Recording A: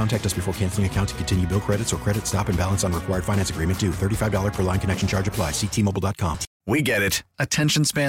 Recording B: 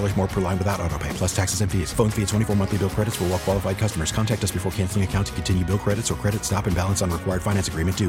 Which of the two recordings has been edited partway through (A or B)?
A